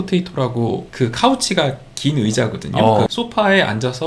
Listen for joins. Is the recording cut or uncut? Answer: cut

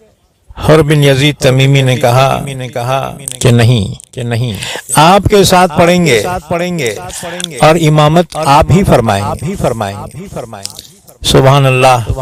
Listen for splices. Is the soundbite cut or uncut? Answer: uncut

